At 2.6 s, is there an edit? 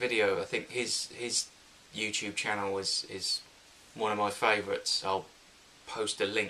yes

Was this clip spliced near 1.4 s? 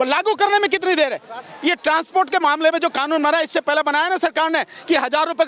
yes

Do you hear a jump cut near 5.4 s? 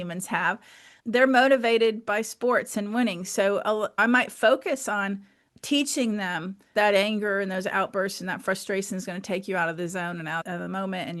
yes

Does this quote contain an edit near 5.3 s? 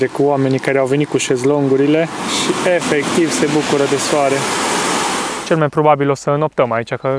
yes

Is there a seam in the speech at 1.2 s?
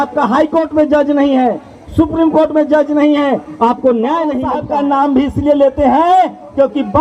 no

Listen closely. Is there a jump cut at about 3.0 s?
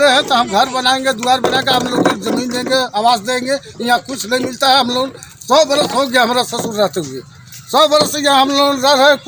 no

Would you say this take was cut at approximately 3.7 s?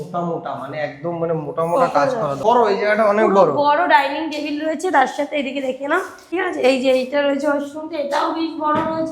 no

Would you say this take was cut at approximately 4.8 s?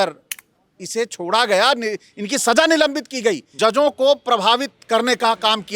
no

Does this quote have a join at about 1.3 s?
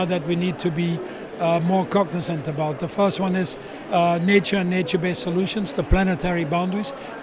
no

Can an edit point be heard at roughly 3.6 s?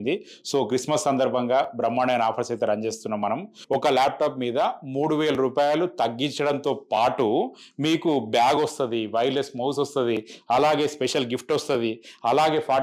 yes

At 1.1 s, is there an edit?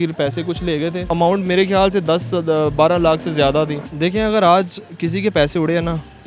yes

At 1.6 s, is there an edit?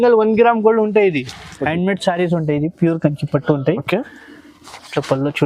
yes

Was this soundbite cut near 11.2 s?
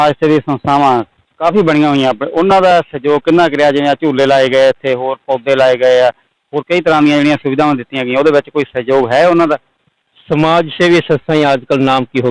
no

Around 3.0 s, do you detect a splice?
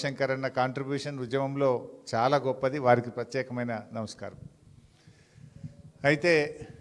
no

